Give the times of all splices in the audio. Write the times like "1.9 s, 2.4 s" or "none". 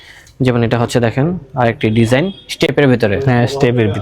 none